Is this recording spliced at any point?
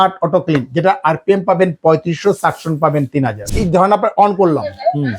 yes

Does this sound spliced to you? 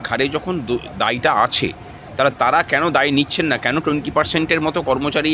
no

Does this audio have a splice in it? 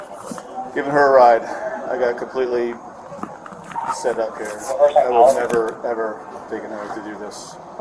no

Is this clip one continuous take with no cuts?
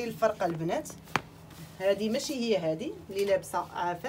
yes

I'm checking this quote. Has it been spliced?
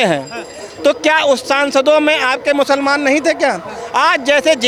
no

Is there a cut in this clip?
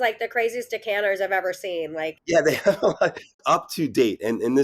yes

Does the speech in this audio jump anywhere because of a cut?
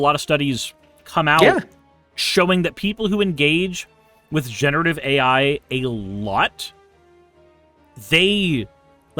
no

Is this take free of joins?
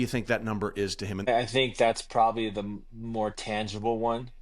no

